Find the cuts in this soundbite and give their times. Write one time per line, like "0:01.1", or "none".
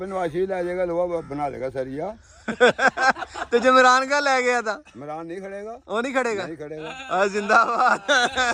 none

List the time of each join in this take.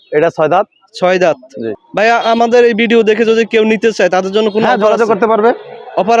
0:01.7

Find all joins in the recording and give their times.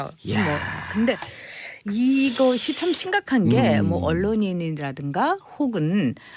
0:02.8

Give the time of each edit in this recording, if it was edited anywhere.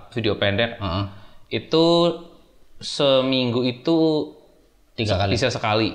none

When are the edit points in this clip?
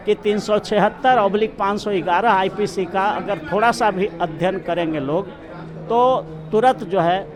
none

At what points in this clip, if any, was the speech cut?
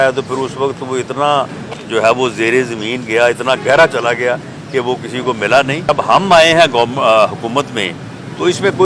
0:05.9

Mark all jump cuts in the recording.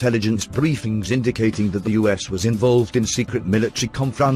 0:01.6

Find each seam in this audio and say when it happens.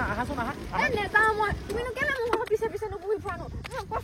none

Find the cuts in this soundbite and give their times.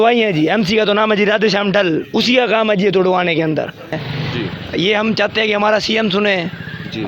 0:04.0

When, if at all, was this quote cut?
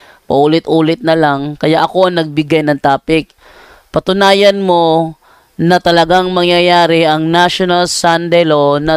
none

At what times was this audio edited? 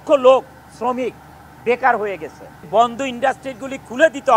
0:02.7

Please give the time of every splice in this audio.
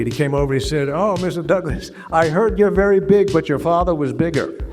none

